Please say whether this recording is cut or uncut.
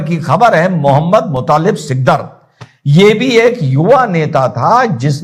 uncut